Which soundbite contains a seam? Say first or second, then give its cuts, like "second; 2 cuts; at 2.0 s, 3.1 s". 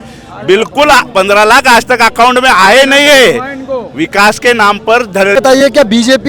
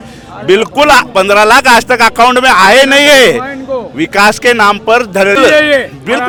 first; 1 cut; at 5.4 s